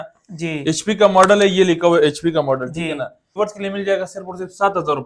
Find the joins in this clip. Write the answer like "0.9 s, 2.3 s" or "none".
3.3 s

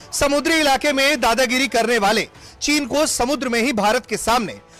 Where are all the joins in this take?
none

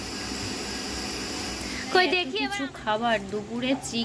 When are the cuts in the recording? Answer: 2.3 s

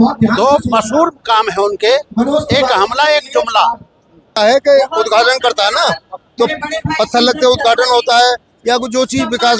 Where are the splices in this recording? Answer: 4.4 s

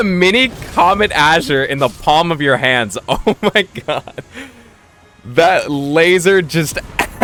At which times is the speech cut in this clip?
none

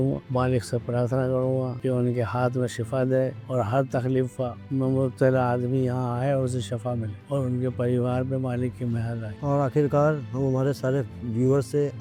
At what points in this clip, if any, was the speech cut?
none

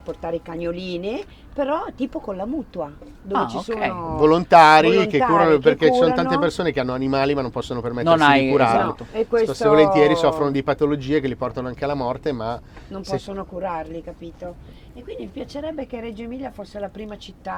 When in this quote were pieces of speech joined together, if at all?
none

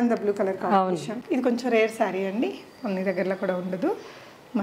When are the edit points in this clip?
1.2 s

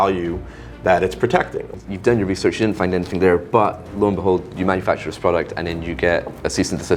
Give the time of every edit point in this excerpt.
1.7 s

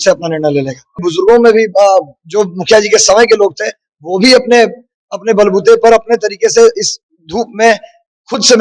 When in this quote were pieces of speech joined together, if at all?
1.1 s

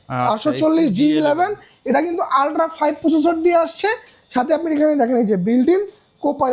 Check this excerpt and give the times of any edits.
none

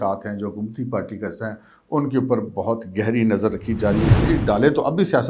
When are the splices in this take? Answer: 4.2 s

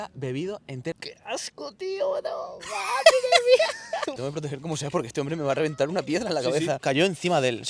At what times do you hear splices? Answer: 0.9 s, 4.2 s, 6.8 s

